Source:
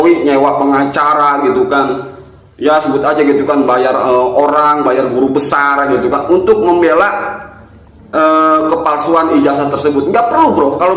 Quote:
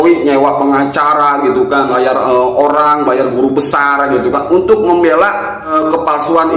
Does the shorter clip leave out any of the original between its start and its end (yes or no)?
yes